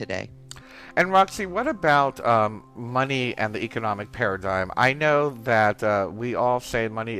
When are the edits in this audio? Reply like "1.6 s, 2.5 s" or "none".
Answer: none